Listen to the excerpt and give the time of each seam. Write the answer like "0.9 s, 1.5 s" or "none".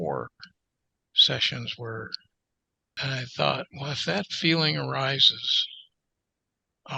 3.0 s

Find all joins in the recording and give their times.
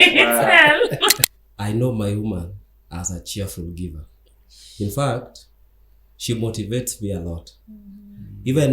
1.2 s

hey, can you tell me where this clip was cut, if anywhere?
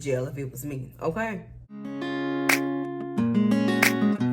1.9 s

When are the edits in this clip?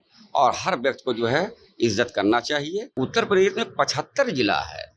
2.8 s

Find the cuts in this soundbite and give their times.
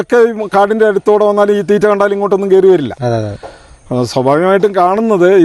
none

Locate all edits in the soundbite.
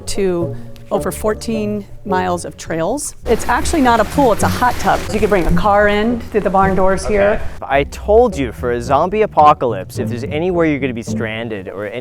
3.3 s, 5.1 s, 7.5 s

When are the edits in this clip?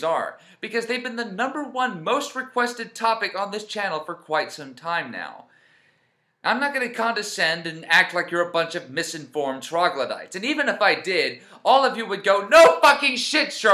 none

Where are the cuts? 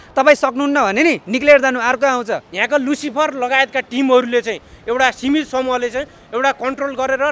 2.5 s

